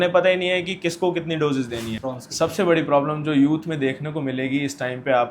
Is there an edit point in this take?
yes; 1 cut; at 2.0 s

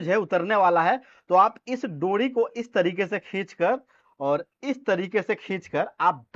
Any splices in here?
no; 0 cuts

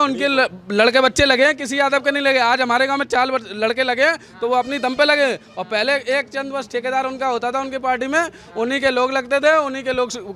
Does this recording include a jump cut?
no; 0 cuts

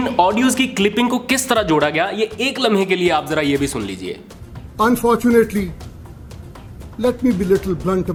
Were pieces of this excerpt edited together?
no; 0 cuts

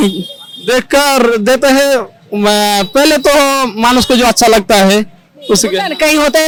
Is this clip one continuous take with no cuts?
yes; 0 cuts

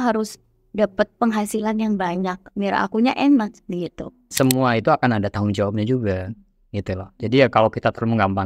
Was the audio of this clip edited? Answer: yes; 1 cut; at 4.3 s

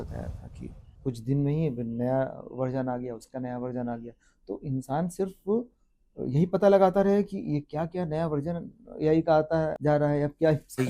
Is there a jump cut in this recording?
yes; 1 cut; at 9.7 s

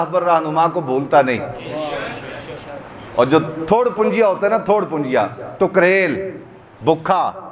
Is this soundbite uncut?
yes; 0 cuts

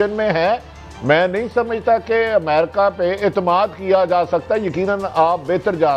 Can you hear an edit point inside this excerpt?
no; 0 cuts

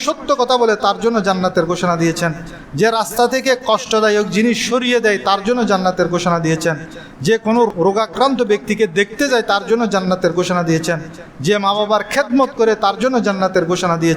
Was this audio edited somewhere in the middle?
yes; 1 cut; at 7.7 s

